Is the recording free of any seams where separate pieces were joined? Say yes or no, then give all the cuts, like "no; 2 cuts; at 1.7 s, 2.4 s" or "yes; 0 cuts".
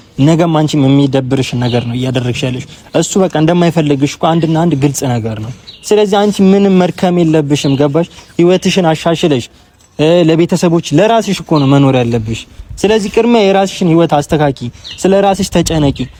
yes; 0 cuts